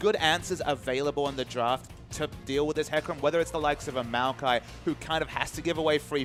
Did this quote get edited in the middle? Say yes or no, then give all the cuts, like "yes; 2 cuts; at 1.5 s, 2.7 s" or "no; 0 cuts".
no; 0 cuts